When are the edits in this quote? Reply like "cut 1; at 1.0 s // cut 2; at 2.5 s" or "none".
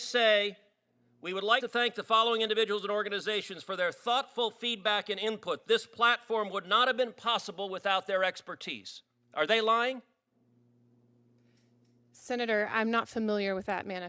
cut 1; at 1.6 s